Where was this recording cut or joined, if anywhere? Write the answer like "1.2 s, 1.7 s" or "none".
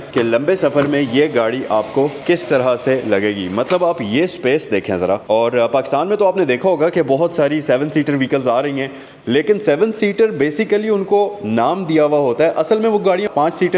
5.2 s